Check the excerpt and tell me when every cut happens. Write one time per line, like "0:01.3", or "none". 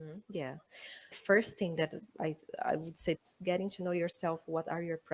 0:01.1
0:03.3